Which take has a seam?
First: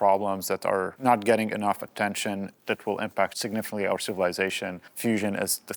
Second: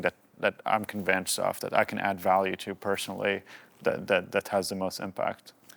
first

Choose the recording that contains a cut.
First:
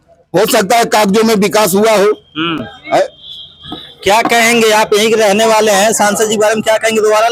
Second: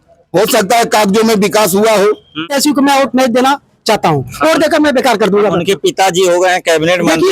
second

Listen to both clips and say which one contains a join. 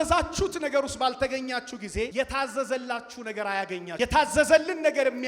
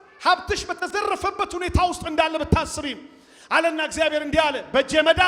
first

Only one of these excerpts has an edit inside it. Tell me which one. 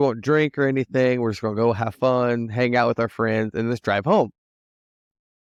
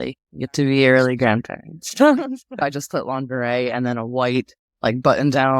second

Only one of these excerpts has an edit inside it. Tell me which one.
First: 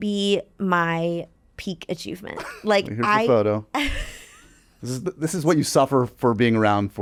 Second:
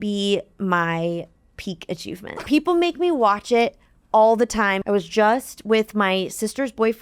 second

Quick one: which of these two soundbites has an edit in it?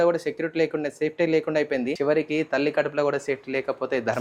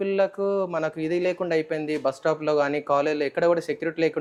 first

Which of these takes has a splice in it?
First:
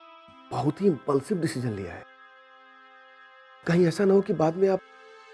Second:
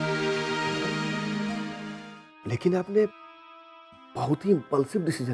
second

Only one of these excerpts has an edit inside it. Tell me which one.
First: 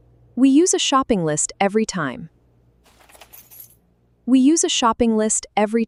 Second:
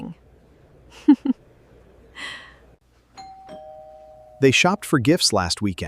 second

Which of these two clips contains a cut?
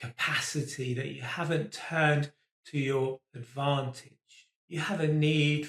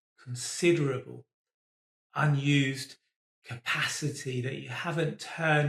first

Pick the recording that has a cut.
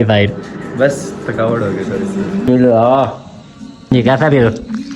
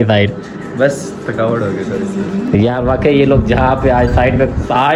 first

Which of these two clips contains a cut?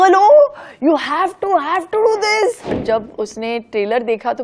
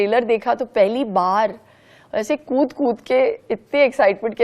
first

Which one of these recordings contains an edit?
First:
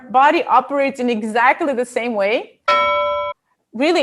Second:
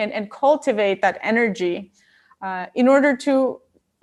first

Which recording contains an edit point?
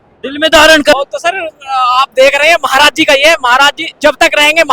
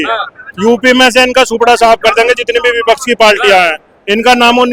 first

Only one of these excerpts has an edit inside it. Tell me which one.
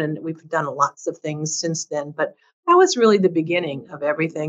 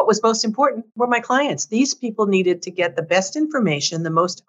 second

